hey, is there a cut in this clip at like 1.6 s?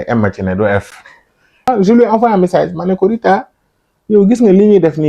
yes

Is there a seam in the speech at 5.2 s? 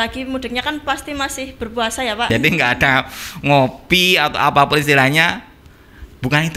no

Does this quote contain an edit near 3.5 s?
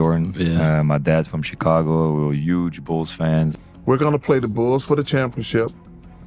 yes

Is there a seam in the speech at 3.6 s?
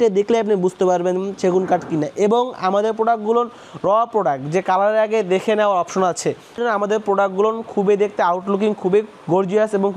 no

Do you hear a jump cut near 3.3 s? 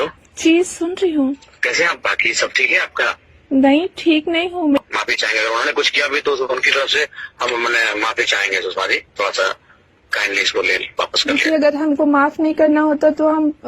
yes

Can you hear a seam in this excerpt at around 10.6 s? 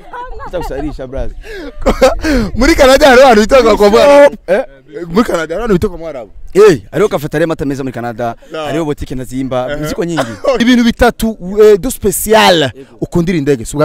yes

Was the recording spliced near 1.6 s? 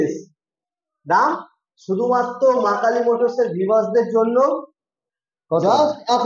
no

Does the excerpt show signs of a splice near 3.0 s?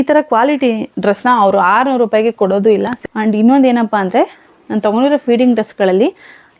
yes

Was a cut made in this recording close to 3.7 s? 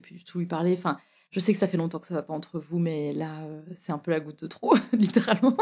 no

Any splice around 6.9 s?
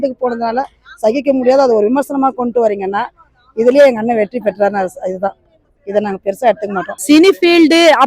yes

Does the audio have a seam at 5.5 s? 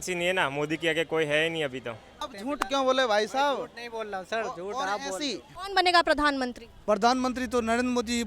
yes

